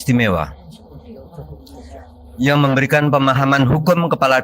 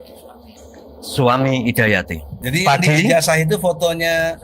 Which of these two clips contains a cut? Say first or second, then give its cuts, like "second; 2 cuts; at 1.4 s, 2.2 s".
second; 1 cut; at 2.5 s